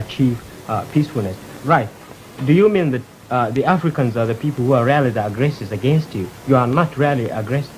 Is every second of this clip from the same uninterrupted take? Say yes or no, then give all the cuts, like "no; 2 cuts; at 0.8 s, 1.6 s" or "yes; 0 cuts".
yes; 0 cuts